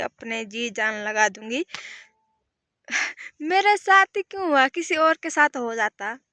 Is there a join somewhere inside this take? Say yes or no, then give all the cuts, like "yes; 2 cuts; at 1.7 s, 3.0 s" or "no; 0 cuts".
no; 0 cuts